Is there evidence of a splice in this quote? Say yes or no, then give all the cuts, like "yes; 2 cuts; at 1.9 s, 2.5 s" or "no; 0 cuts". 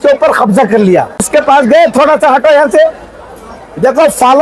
yes; 1 cut; at 1.3 s